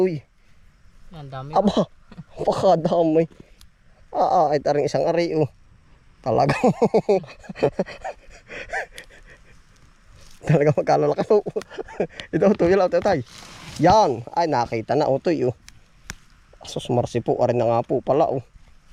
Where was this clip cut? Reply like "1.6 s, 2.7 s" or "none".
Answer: none